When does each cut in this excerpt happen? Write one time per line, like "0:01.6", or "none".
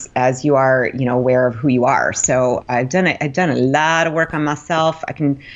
none

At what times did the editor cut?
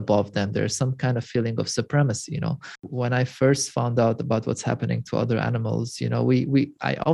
0:02.9

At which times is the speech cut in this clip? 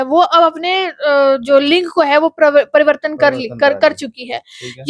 none

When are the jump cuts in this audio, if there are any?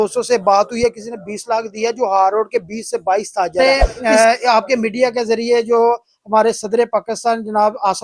0:03.5

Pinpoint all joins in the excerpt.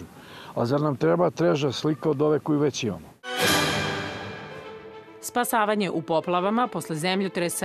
0:03.1
0:04.1

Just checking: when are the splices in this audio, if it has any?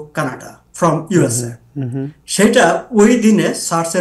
none

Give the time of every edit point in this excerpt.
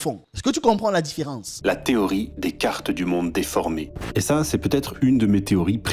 0:01.5

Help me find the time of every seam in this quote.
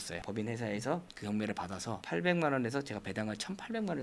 none

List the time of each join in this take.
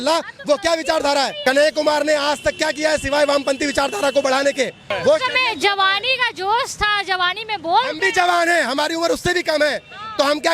0:01.3
0:04.9

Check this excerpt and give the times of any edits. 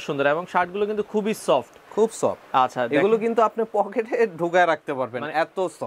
none

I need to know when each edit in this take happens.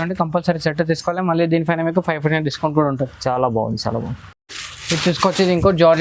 none

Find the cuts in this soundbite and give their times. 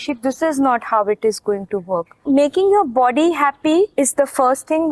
0:02.3
0:03.9

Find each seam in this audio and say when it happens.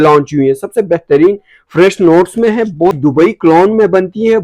0:03.0

